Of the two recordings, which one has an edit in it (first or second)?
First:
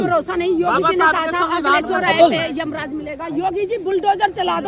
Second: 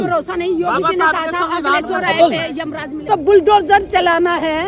second